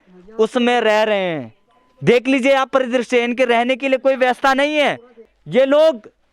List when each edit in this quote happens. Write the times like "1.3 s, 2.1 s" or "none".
5.3 s